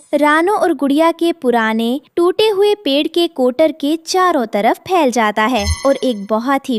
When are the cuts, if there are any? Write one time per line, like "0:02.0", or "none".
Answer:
none